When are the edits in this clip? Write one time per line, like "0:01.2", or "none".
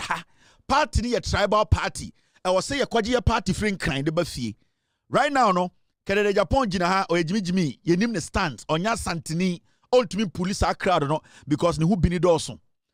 none